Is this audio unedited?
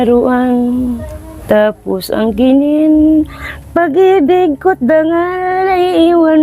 no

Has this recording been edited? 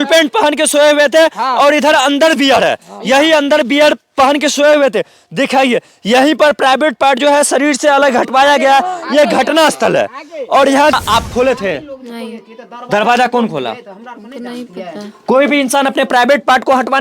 yes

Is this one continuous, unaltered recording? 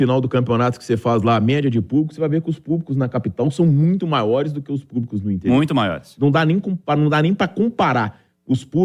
yes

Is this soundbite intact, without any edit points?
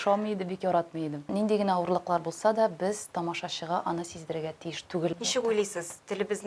no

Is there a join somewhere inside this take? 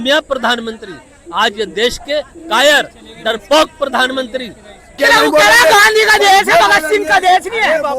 yes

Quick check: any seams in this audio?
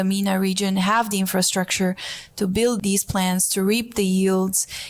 yes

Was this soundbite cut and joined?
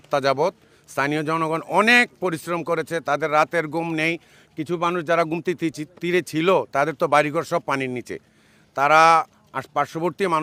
no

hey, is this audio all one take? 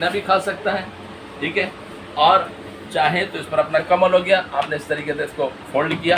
no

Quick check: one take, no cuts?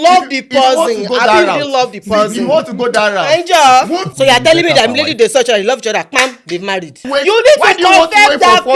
no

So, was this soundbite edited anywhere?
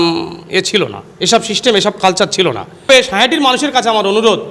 yes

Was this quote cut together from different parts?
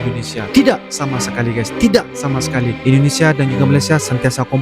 no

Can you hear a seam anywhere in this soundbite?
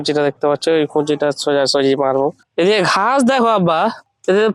no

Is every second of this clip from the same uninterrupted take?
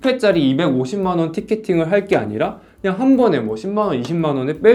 yes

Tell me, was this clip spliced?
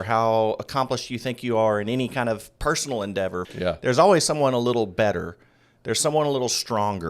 yes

